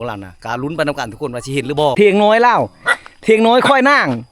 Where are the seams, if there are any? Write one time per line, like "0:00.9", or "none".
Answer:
0:01.9